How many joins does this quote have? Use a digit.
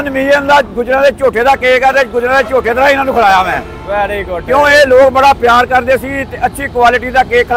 0